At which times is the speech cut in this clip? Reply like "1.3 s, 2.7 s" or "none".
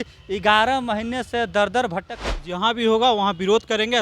2.1 s